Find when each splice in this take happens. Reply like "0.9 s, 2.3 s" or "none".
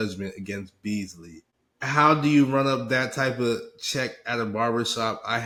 none